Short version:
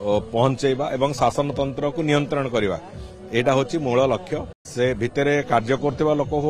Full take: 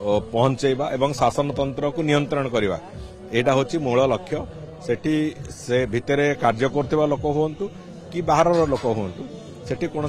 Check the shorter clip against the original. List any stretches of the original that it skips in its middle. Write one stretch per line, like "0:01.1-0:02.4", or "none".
0:04.6-0:05.5